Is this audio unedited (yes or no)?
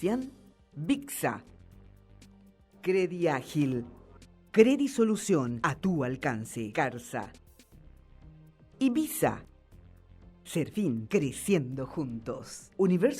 no